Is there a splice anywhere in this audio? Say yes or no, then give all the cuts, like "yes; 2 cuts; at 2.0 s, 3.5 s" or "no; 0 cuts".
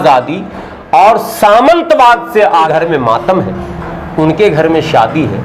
yes; 1 cut; at 2.7 s